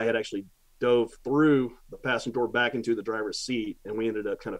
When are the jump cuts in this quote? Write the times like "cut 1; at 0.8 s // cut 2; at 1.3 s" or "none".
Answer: none